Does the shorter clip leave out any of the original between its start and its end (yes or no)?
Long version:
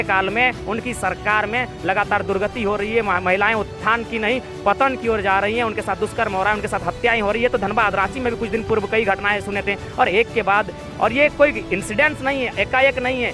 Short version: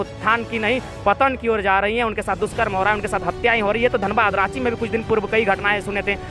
no